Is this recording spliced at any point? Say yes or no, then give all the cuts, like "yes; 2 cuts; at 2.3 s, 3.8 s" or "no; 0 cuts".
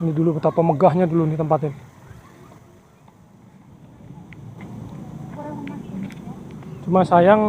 yes; 1 cut; at 3.4 s